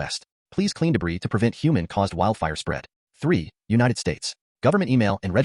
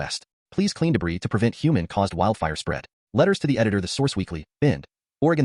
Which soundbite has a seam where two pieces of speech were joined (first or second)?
first